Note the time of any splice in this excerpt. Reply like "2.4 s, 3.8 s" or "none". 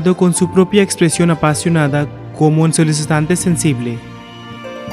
2.2 s, 4.0 s